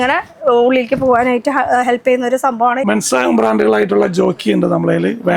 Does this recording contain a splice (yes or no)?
yes